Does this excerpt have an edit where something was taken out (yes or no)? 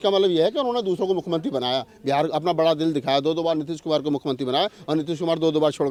no